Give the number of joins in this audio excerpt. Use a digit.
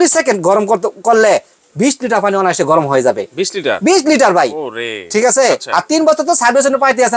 0